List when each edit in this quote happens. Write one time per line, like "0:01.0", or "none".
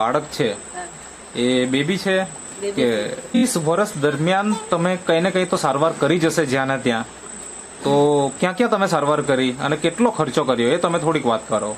0:03.4